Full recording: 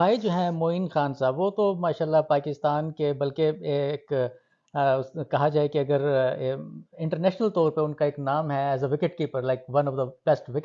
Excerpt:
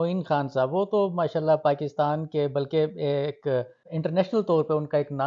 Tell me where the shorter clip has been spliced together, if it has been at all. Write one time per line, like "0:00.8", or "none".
0:03.8